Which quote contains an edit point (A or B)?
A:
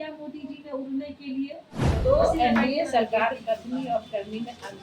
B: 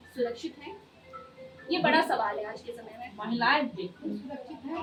A